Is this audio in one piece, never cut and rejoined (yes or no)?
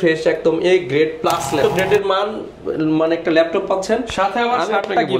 no